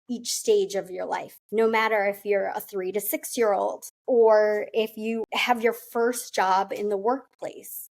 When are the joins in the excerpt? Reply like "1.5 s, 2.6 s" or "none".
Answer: 3.9 s, 5.2 s